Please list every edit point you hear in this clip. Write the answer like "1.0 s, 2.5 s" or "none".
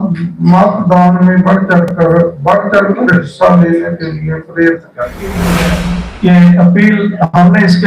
5.4 s